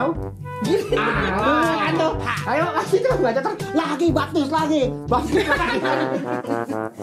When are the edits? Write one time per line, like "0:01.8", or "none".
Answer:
none